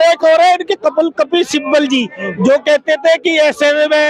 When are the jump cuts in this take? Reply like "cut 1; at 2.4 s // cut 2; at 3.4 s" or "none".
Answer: none